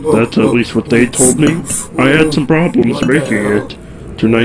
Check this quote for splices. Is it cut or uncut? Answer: cut